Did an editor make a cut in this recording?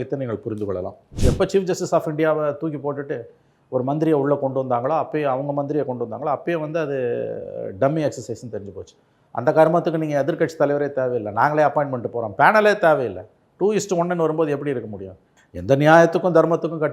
yes; 1 cut; at 1.0 s

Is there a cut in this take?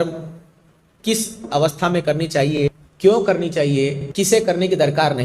yes; 2 cuts; at 2.5 s, 4.0 s

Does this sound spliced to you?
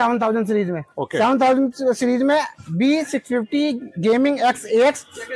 no; 0 cuts

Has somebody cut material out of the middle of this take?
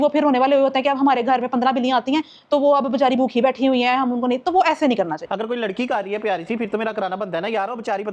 yes; 1 cut; at 5.2 s

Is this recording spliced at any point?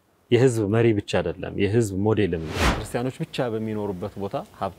yes; 1 cut; at 2.7 s

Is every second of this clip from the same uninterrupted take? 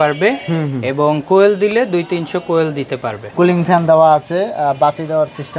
no; 1 cut; at 3.3 s

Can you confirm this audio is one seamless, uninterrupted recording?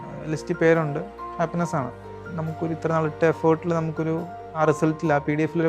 no; 2 cuts; at 1.2 s, 2.2 s

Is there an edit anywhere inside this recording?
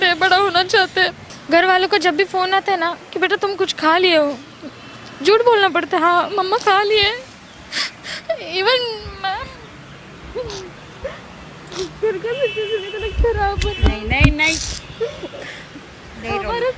yes; 1 cut; at 1.2 s

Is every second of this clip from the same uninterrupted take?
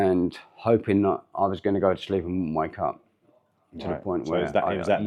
yes; 0 cuts

